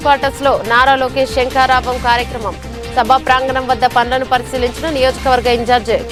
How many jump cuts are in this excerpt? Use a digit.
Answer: 0